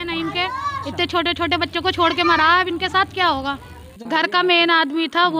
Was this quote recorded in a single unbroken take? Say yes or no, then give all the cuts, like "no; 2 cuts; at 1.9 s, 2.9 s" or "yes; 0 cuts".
no; 1 cut; at 3.9 s